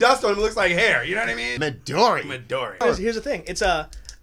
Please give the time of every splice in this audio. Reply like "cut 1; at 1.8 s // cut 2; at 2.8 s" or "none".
cut 1; at 1.5 s // cut 2; at 2.8 s